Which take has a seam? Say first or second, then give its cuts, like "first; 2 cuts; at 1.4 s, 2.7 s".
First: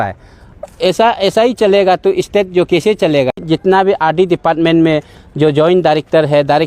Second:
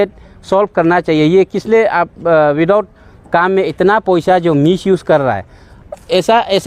first; 1 cut; at 3.3 s